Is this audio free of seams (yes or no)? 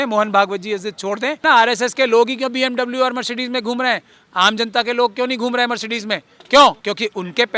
no